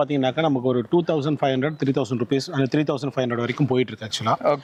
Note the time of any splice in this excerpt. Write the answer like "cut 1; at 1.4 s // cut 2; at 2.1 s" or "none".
none